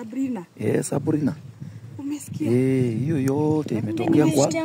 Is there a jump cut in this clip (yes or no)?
no